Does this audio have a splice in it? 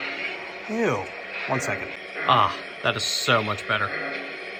no; 0 cuts

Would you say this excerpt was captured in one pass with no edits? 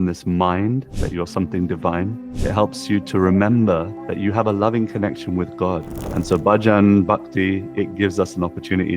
no; 4 cuts; at 1.0 s, 2.3 s, 4.0 s, 6.0 s

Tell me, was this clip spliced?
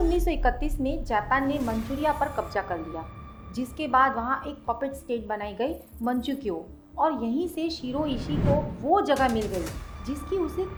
no; 0 cuts

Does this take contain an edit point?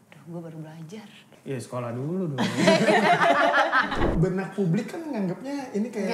yes; 2 cuts; at 1.3 s, 4.1 s

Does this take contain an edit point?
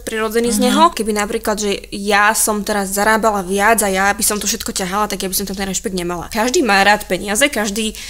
yes; 2 cuts; at 1.0 s, 6.2 s

